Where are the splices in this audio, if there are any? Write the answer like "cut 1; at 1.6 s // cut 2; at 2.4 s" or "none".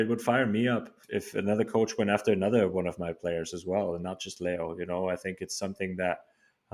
cut 1; at 1.0 s